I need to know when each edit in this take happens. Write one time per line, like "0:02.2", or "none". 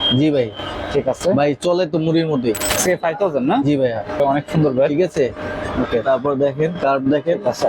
0:02.7
0:04.2